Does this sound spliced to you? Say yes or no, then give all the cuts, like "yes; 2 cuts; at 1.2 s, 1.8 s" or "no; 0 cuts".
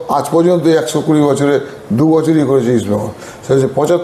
no; 0 cuts